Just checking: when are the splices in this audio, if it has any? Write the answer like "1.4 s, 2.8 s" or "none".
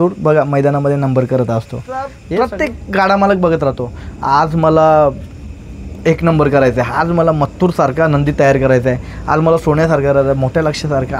2.2 s